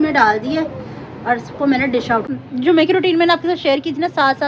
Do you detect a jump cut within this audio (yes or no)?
yes